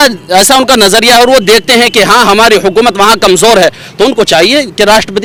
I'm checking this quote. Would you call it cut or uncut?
uncut